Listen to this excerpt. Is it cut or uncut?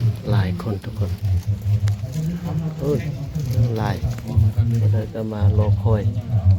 uncut